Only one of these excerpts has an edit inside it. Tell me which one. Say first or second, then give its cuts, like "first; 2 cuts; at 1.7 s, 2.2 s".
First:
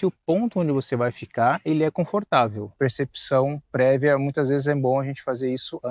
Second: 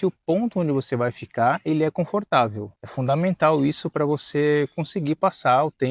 first; 1 cut; at 2.7 s